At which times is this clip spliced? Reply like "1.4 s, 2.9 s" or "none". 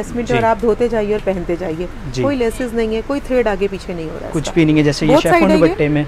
none